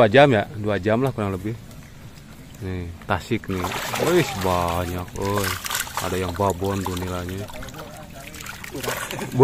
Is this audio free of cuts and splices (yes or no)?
yes